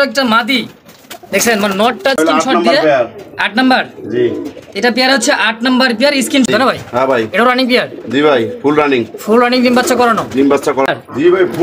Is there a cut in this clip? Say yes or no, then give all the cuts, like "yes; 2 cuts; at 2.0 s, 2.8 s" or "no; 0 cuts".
yes; 3 cuts; at 2.2 s, 6.5 s, 10.9 s